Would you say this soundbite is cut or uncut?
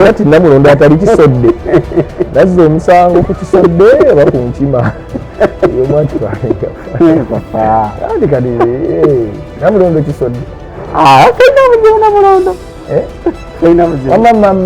uncut